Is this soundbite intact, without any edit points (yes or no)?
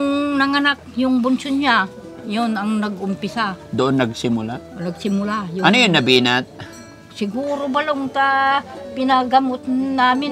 yes